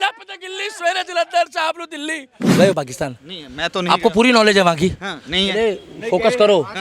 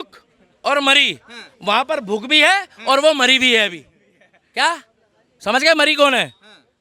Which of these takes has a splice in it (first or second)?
first